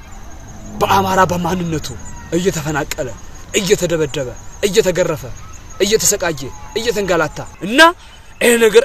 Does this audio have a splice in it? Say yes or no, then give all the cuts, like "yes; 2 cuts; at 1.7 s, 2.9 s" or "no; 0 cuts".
yes; 1 cut; at 7.5 s